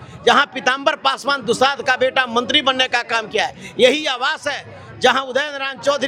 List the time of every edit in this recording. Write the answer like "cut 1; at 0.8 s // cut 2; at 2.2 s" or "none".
none